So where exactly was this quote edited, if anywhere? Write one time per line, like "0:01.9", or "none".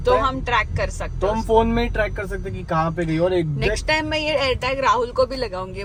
none